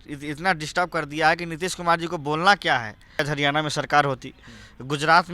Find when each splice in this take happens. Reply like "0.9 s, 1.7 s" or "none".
3.2 s